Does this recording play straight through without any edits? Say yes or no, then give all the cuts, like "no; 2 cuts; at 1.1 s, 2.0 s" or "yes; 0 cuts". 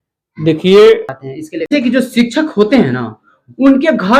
no; 1 cut; at 1.7 s